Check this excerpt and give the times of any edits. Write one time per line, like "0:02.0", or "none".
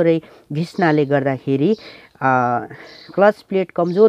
none